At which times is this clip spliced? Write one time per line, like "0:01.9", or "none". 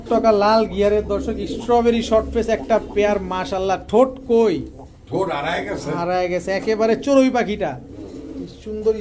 none